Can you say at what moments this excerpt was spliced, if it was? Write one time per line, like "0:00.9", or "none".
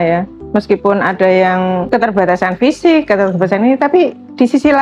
0:01.8